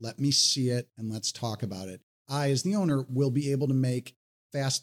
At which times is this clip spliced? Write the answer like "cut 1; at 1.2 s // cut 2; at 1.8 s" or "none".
none